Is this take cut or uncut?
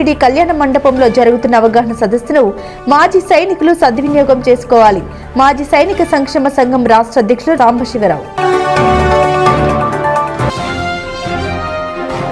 uncut